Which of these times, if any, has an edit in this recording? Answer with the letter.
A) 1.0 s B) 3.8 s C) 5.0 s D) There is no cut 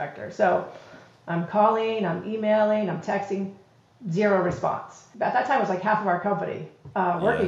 C